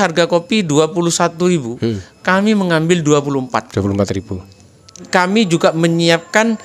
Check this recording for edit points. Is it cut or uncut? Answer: cut